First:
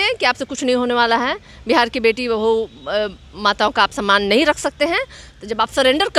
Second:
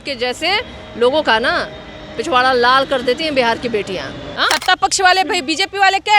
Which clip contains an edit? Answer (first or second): second